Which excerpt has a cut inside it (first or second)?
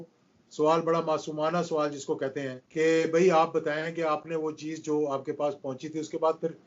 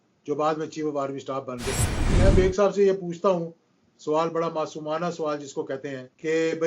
second